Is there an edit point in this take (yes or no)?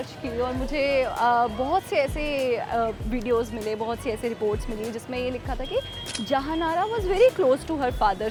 no